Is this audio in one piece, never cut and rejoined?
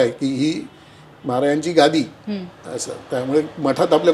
yes; 0 cuts

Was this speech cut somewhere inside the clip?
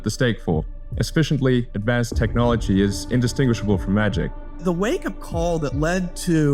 yes; 3 cuts; at 0.8 s, 1.7 s, 4.5 s

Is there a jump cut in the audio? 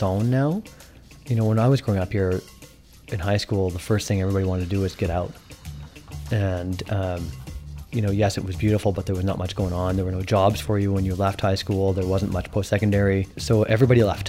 yes; 1 cut; at 13.3 s

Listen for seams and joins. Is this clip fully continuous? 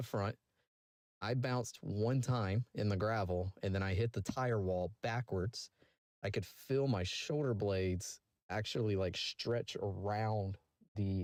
yes; 0 cuts

